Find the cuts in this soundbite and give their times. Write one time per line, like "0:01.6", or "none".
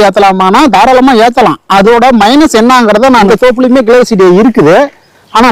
0:03.3

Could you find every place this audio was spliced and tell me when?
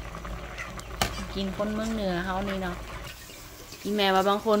0:03.1

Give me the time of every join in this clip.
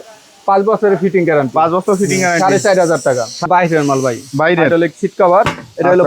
0:03.5

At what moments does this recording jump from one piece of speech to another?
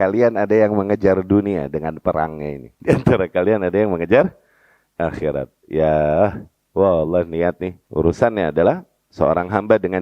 0:02.7
0:07.7

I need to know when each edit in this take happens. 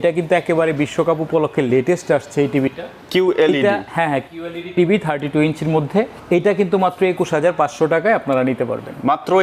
none

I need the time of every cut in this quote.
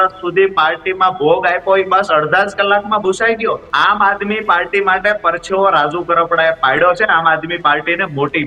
0:03.7

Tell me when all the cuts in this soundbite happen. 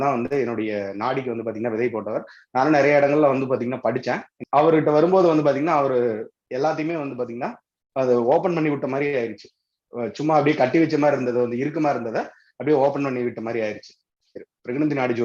0:04.3
0:14.3

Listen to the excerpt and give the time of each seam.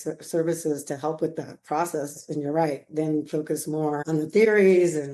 0:04.0

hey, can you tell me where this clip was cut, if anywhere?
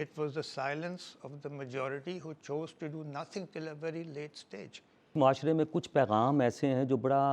0:05.1

